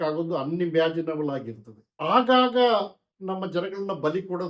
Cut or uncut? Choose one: cut